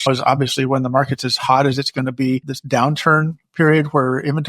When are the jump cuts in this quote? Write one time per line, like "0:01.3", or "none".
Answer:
0:02.6